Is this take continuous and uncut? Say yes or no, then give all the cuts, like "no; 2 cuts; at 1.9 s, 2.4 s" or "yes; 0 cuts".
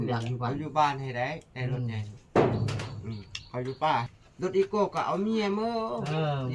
no; 1 cut; at 4.2 s